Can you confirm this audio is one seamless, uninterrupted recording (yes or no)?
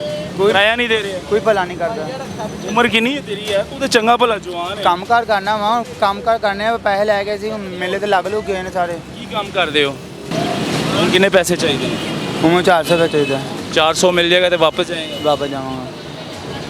no